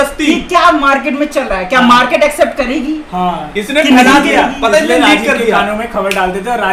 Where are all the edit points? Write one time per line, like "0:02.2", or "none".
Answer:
none